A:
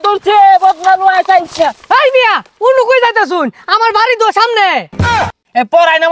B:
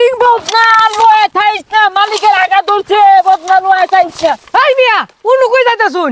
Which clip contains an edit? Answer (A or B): A